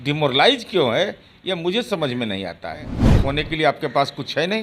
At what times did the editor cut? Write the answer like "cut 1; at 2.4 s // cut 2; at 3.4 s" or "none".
cut 1; at 3.0 s